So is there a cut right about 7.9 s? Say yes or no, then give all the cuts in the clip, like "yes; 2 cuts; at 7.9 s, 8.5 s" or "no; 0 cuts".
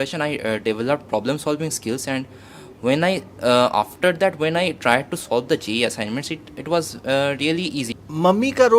yes; 1 cut; at 7.9 s